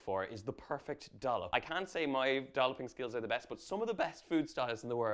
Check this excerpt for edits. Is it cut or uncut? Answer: cut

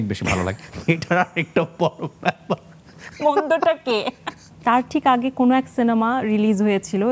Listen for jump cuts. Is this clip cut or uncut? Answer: cut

